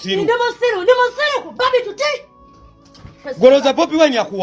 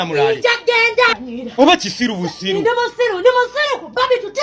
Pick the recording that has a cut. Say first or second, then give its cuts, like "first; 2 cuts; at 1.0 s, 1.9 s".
second; 1 cut; at 1.2 s